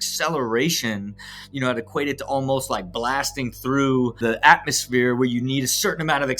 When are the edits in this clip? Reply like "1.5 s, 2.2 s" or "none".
4.2 s